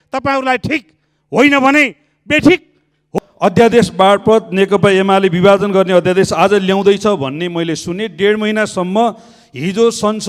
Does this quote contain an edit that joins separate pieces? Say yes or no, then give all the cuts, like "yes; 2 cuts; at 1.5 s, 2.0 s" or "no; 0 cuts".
yes; 1 cut; at 3.0 s